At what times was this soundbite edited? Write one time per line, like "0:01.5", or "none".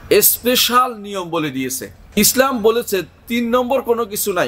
0:02.2